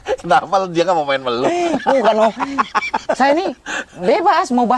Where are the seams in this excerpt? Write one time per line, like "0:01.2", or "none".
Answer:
none